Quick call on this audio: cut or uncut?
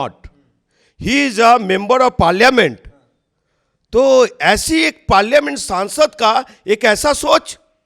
uncut